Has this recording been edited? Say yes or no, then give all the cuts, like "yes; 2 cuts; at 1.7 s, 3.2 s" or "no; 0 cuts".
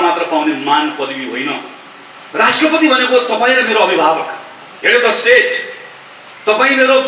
no; 0 cuts